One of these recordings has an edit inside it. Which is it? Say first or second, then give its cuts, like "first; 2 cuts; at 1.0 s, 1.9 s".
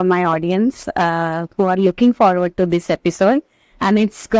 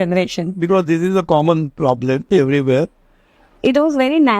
second; 1 cut; at 3.4 s